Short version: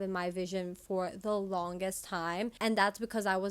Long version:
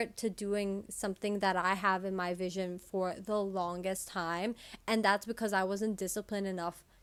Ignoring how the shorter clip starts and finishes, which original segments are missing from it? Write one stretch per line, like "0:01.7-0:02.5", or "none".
0:04.6-0:04.8